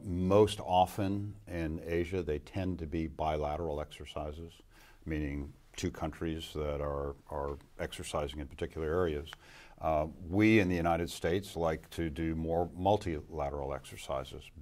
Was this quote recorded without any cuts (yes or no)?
no